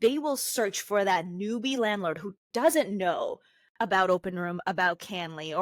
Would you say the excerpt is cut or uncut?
uncut